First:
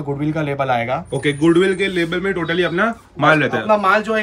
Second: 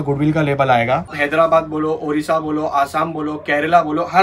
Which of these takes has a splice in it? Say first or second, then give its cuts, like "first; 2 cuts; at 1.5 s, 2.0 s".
second; 1 cut; at 1.1 s